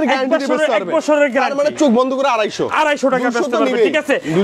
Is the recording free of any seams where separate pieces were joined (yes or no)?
yes